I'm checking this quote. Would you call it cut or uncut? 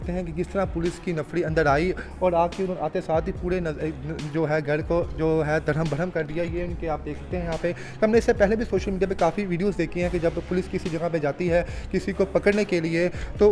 uncut